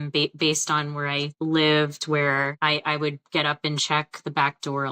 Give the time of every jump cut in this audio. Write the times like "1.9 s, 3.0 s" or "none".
1.3 s, 2.5 s